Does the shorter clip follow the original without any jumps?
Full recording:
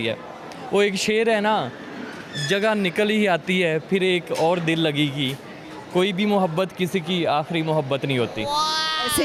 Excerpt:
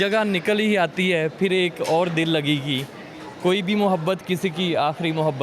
yes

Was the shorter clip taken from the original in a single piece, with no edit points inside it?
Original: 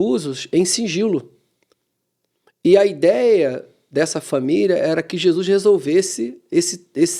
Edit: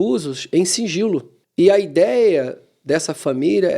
no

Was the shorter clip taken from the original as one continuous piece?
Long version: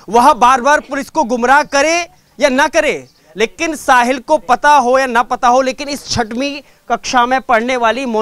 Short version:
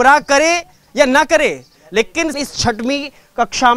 no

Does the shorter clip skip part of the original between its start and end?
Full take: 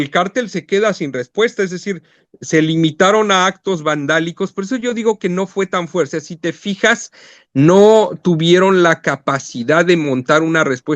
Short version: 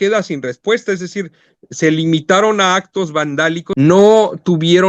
yes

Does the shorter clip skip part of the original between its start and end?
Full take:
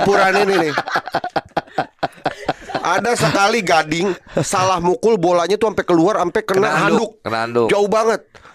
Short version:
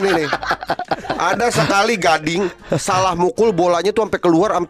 yes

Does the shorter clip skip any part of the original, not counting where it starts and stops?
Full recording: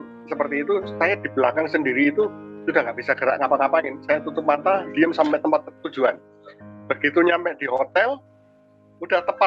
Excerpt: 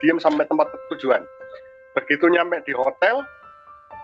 no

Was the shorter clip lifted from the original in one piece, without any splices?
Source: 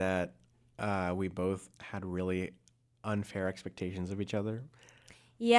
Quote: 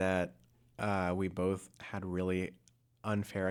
yes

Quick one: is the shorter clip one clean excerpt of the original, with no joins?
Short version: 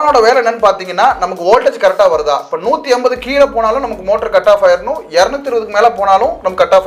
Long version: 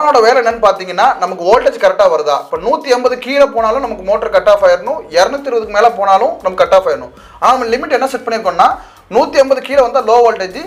yes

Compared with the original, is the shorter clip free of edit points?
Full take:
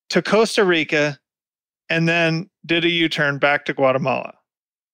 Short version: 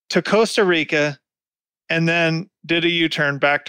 yes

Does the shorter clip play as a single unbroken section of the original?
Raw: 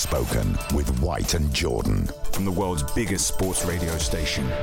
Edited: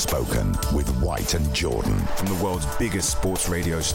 no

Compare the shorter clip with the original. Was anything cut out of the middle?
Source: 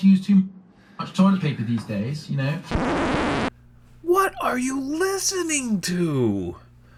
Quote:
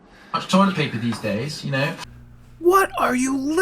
yes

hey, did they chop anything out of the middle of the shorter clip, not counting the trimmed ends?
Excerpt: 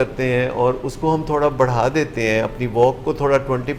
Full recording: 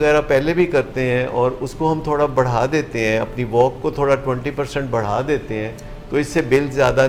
no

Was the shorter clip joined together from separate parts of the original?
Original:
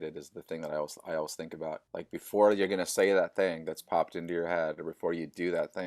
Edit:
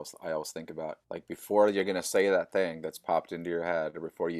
no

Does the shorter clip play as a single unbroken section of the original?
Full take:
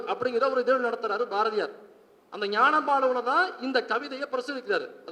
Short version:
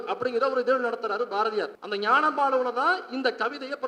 no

